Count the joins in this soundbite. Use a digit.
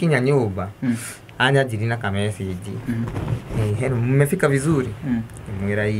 0